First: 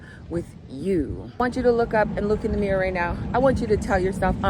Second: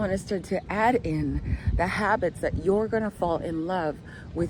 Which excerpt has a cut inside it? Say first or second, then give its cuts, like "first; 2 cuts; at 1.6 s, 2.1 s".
first; 1 cut; at 1.4 s